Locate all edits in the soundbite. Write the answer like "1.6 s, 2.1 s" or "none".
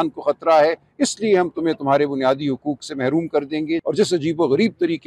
3.8 s